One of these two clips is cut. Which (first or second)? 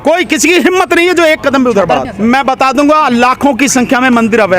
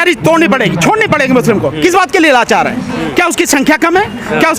first